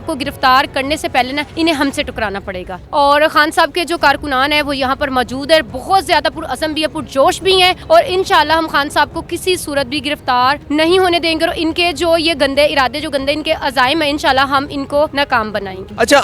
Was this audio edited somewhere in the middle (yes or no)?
no